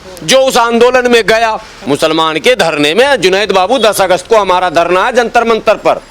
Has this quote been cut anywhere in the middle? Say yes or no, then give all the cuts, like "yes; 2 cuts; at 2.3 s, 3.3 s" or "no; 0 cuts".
yes; 1 cut; at 1.7 s